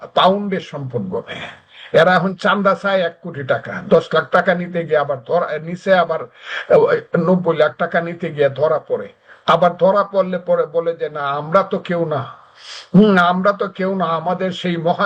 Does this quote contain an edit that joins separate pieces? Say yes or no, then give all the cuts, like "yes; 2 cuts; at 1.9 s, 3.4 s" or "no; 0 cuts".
no; 0 cuts